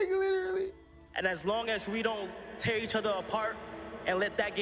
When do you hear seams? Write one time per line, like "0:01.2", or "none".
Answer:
0:00.9